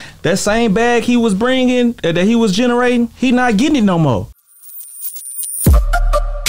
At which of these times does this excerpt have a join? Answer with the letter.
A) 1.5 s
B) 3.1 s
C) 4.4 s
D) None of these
C